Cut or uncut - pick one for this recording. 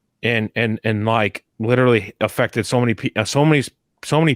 cut